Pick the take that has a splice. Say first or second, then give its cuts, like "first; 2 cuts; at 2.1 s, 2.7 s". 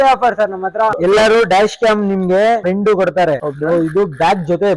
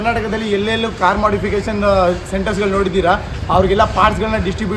first; 3 cuts; at 1.0 s, 2.6 s, 3.5 s